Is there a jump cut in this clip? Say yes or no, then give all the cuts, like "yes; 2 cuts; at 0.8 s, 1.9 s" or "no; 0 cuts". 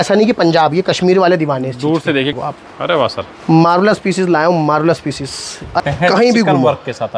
yes; 2 cuts; at 2.4 s, 5.8 s